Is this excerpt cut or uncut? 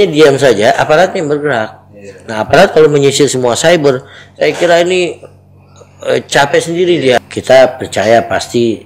cut